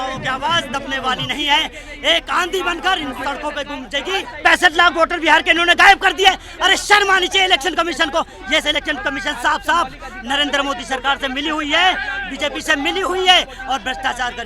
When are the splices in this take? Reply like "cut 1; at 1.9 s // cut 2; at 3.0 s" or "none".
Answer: cut 1; at 4.3 s // cut 2; at 8.4 s